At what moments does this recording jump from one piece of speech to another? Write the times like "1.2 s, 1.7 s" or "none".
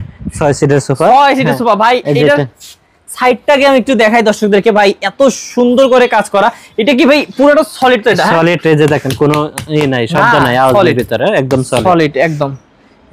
none